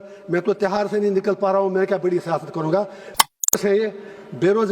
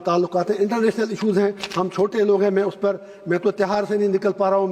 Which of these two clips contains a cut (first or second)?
first